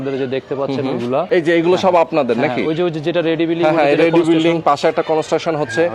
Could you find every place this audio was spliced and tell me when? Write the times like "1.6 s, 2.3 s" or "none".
1.3 s